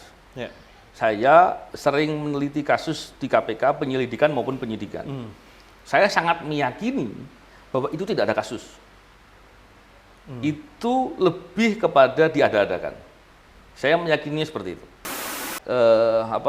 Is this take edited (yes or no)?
yes